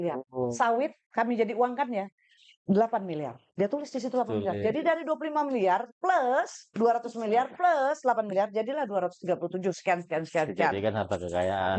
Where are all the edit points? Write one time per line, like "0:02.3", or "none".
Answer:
none